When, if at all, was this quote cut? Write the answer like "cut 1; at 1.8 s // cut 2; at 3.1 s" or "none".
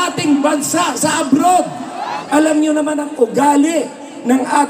cut 1; at 2.1 s